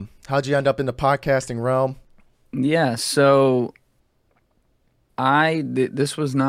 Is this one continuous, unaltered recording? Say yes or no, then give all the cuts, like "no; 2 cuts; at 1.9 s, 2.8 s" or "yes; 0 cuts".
no; 1 cut; at 2.1 s